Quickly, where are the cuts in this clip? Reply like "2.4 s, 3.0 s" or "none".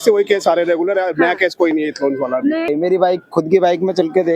2.7 s